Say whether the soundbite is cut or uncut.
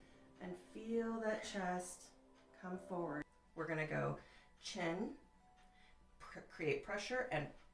cut